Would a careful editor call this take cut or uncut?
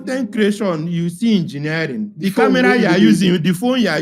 uncut